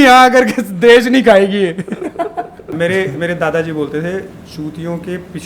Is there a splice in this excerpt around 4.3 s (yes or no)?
no